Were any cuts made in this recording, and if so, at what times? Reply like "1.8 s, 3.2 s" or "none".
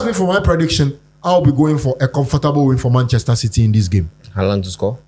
none